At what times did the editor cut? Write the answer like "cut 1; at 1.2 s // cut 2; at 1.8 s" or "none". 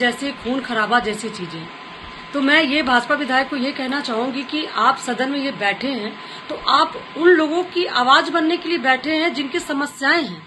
none